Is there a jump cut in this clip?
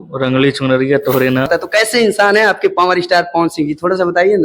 yes; 1 cut; at 1.5 s

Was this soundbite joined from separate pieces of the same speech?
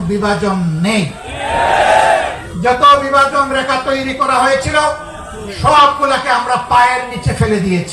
no; 0 cuts

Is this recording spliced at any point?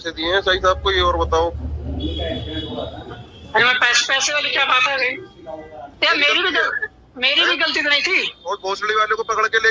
yes; 1 cut; at 5.8 s

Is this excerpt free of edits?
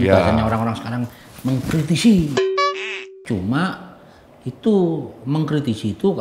no; 1 cut; at 3.1 s

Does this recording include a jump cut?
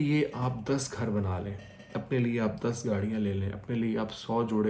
no; 0 cuts

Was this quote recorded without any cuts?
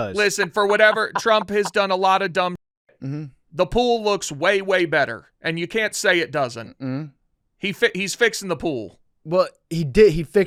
yes; 0 cuts

